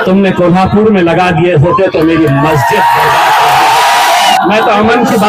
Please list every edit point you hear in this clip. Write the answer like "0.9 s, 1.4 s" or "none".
4.3 s